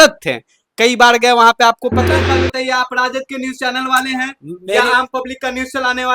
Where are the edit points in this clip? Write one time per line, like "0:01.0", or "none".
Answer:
0:02.0